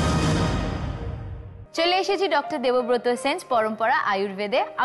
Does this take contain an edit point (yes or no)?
yes